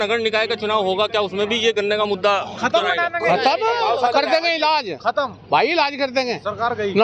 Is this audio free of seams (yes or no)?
yes